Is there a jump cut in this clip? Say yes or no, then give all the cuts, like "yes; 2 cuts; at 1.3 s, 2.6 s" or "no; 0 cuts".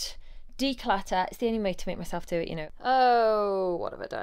yes; 1 cut; at 2.8 s